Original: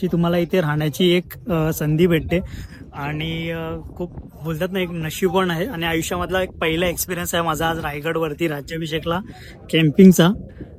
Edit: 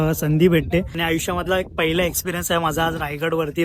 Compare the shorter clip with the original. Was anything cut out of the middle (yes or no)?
yes